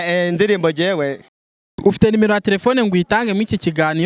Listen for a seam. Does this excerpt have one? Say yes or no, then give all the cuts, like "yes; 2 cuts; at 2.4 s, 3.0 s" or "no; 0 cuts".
yes; 1 cut; at 1.8 s